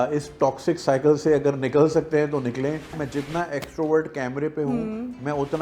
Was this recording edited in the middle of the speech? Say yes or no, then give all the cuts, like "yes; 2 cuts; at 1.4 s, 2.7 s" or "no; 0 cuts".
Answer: yes; 1 cut; at 2.9 s